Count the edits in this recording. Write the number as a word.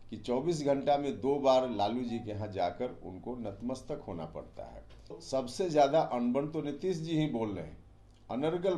one